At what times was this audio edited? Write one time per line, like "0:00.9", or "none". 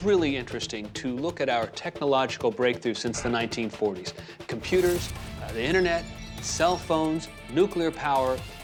none